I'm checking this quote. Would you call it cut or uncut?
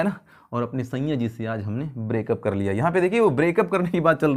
uncut